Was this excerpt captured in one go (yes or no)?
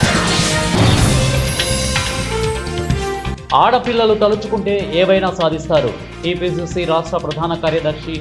yes